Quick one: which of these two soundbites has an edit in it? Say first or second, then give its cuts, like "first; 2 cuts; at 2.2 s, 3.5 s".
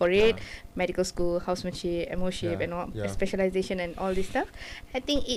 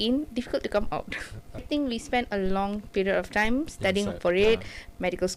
second; 1 cut; at 1.6 s